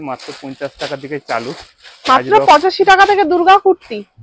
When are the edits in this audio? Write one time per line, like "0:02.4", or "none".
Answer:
none